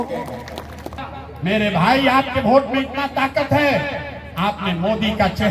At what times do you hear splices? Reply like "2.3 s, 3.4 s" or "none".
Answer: 1.0 s